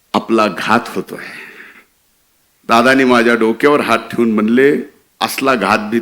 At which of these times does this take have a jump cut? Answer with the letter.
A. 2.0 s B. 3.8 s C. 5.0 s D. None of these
C